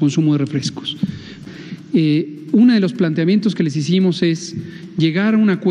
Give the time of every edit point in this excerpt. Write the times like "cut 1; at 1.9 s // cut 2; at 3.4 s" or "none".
cut 1; at 1.3 s